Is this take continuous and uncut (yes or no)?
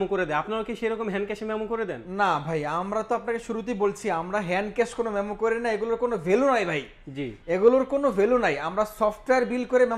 yes